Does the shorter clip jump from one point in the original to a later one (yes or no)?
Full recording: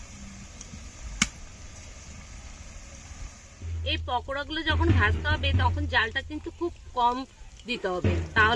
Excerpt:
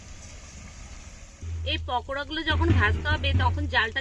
yes